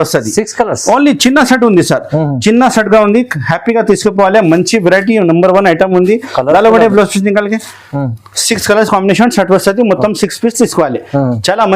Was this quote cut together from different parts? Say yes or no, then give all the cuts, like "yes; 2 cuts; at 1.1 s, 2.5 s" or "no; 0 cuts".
no; 0 cuts